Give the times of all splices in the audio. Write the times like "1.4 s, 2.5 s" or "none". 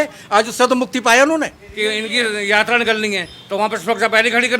1.6 s

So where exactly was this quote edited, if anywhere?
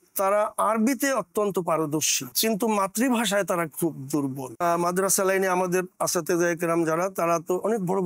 4.6 s

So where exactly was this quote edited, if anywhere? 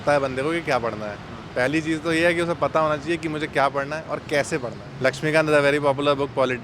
4.8 s

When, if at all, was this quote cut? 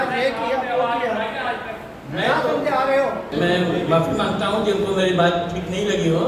3.2 s

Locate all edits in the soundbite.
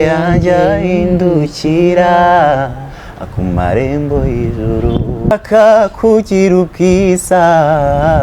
5.3 s

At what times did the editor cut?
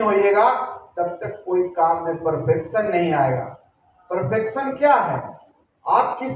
none

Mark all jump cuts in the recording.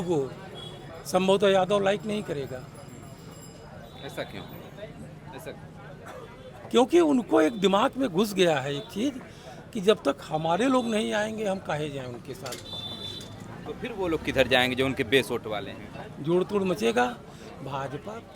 none

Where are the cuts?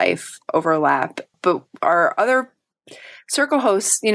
1.3 s

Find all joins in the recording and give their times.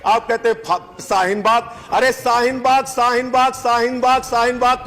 1.8 s

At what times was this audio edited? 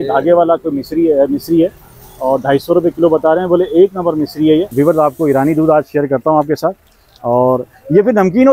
4.7 s

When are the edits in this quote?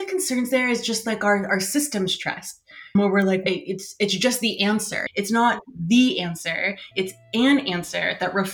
5.0 s

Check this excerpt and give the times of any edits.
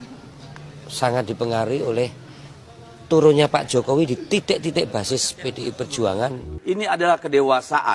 6.5 s

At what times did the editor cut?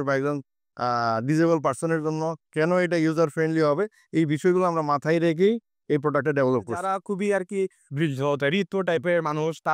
6.9 s

